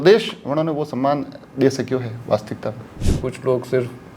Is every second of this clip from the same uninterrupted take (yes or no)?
no